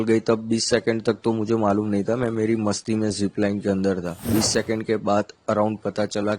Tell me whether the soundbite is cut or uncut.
cut